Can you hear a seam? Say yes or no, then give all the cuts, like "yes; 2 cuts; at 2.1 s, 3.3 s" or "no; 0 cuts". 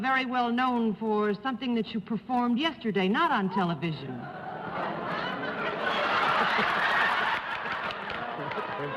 yes; 1 cut; at 5.9 s